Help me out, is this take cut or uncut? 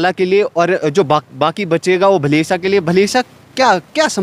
uncut